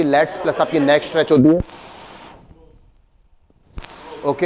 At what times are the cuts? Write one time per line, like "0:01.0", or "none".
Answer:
none